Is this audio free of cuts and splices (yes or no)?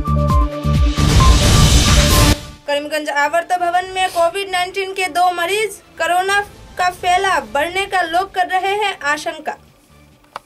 yes